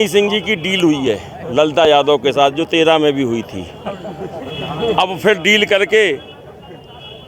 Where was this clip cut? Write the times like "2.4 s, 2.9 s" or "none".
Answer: none